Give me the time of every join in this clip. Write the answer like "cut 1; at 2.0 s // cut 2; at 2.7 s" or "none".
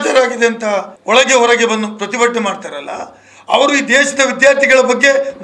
cut 1; at 0.9 s